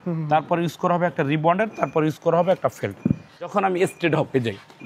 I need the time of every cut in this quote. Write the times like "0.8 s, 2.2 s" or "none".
3.5 s